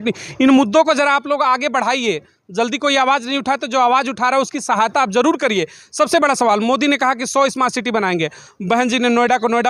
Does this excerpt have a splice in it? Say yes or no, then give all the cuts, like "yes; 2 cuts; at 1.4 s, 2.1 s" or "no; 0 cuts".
no; 0 cuts